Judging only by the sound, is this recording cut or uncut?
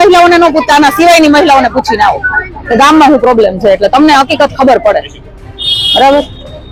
uncut